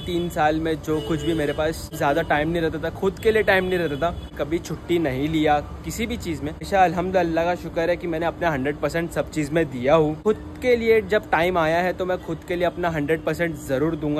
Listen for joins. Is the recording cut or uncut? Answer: cut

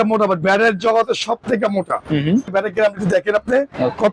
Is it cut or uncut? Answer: cut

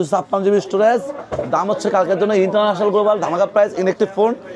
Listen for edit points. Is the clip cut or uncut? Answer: uncut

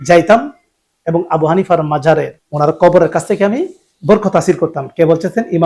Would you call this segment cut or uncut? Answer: cut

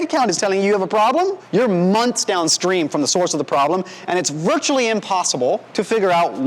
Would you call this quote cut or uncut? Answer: cut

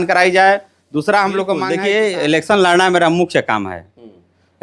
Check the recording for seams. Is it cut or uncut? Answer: cut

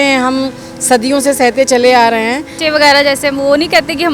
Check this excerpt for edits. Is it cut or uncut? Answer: cut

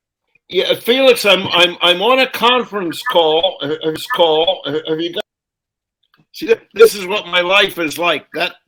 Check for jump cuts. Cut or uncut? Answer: uncut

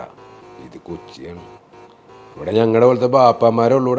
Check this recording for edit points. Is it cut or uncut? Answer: uncut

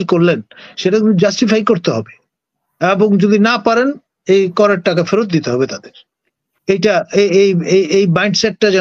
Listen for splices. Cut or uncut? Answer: uncut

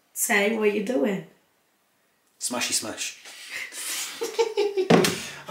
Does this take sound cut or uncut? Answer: uncut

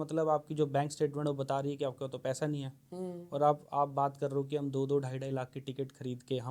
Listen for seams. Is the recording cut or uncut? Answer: uncut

